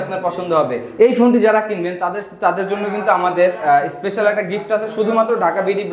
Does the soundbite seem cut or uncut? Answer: cut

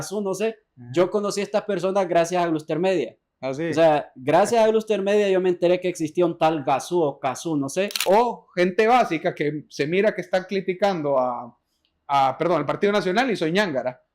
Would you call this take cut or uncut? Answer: cut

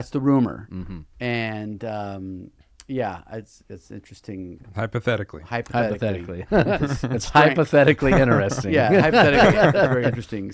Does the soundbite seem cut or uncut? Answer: uncut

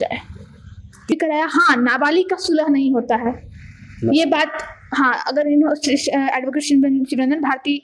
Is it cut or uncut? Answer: cut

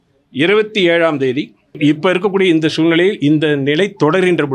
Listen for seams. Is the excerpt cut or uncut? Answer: cut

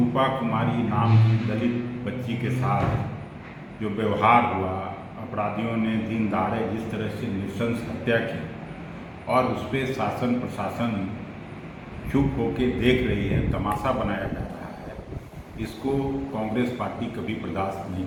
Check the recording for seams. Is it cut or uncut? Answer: uncut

